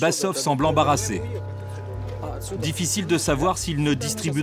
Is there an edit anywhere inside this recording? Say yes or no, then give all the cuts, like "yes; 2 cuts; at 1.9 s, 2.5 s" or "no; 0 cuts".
no; 0 cuts